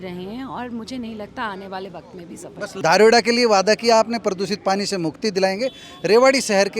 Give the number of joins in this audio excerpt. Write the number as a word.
one